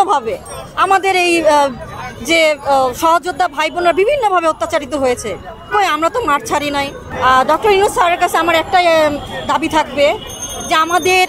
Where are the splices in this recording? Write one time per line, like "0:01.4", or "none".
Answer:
0:07.0